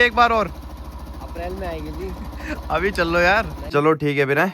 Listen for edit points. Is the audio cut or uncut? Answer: cut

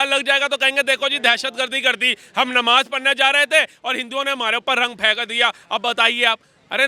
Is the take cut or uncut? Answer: uncut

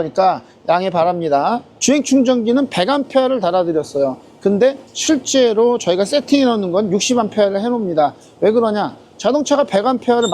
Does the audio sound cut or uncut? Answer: cut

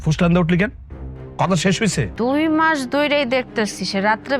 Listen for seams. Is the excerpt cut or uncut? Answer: cut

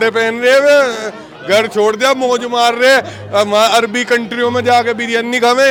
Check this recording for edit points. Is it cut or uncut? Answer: uncut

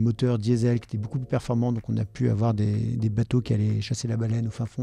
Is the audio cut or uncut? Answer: uncut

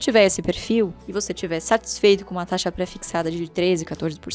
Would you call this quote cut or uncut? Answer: uncut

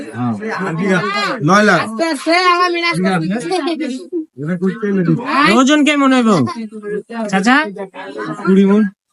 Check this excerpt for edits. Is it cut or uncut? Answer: uncut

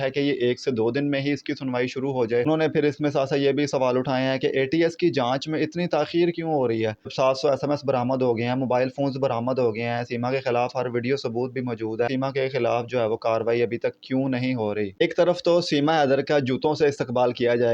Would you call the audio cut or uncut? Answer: cut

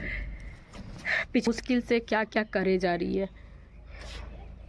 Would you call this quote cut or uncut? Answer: cut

